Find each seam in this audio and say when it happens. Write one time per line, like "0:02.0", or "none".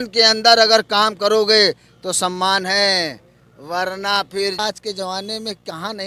0:04.6